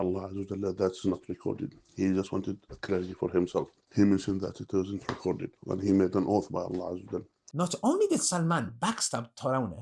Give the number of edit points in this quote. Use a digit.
2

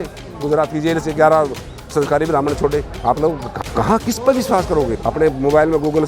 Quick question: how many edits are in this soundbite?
2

